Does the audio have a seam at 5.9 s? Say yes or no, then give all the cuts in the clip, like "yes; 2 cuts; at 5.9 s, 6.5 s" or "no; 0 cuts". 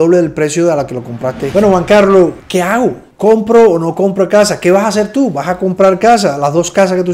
no; 1 cut; at 1.5 s